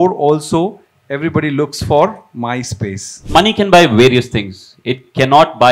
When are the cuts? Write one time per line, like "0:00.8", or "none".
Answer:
0:03.2